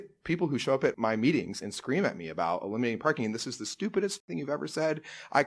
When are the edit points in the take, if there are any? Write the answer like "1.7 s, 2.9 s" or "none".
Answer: 1.0 s

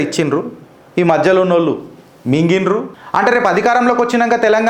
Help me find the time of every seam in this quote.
3.0 s

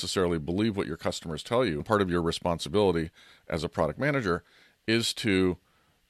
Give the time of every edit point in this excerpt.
1.8 s

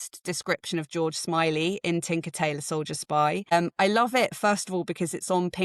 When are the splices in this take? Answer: 3.5 s

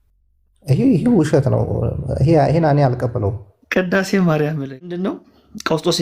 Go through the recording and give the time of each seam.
5.1 s

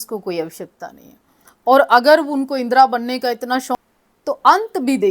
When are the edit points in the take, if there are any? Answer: 3.8 s

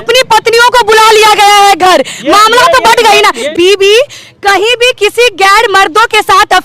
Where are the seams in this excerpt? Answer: 3.5 s

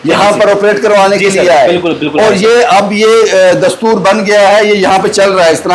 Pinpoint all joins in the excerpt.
none

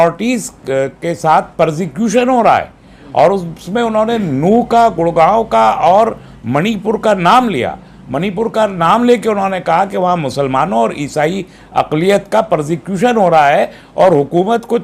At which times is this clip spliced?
none

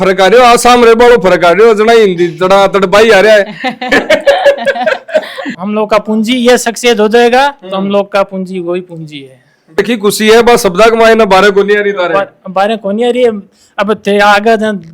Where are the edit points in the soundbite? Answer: 5.5 s, 9.8 s

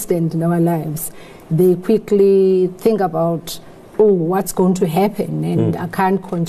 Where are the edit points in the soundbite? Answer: none

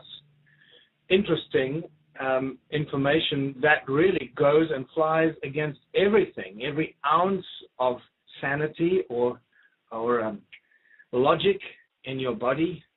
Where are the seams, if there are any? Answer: 10.9 s

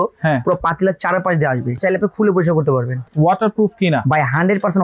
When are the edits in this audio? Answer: 1.8 s, 3.0 s

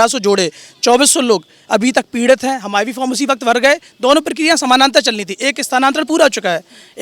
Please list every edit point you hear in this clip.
none

